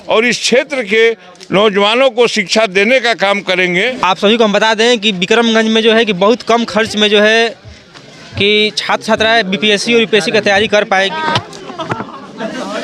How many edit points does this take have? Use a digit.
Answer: 2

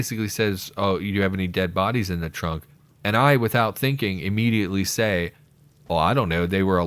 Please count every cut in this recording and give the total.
0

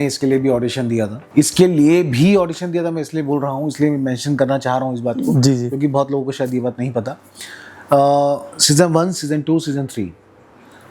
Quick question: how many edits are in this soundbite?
1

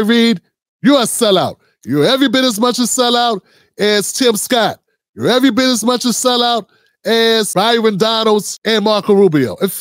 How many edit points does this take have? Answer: 2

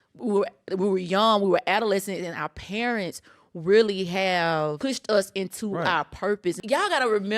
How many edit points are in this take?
2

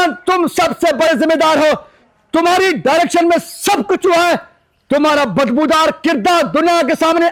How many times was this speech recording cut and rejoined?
0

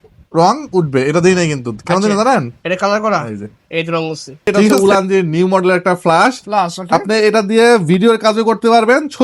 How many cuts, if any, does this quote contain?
1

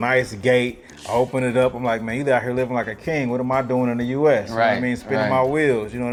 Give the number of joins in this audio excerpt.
0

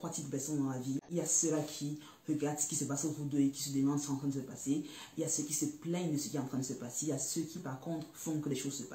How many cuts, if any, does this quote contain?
1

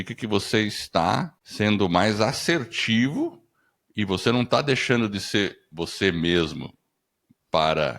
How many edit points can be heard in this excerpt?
1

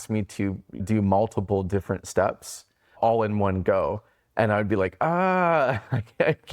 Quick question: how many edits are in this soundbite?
2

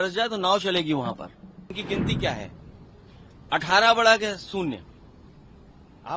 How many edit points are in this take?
1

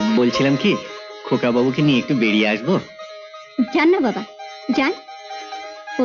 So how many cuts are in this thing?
0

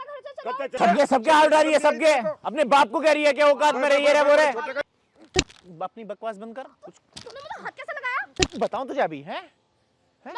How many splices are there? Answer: 3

